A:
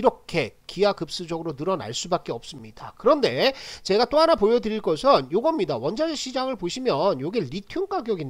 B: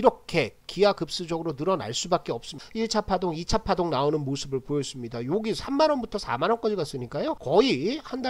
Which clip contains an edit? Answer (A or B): B